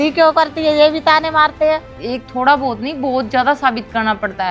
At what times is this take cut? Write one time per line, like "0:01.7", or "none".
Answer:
0:02.0

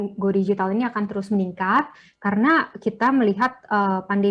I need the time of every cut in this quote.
none

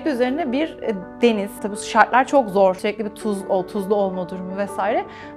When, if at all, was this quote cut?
0:01.6
0:02.8

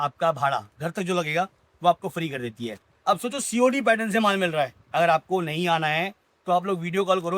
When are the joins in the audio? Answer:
none

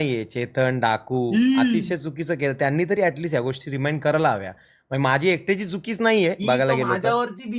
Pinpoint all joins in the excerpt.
none

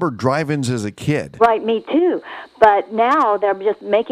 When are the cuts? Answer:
none

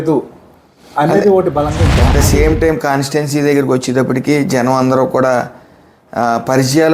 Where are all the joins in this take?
0:01.9

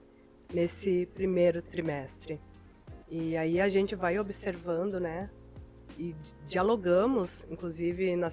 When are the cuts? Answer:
0:01.7

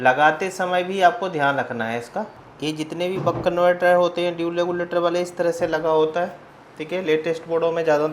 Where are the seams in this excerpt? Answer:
0:02.4

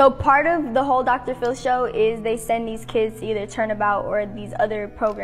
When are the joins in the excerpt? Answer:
0:01.0

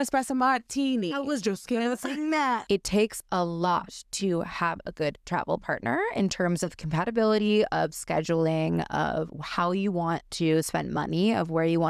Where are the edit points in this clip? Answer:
0:02.6

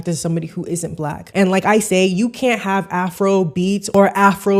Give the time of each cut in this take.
0:01.2

